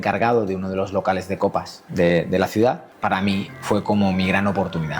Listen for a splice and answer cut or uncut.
cut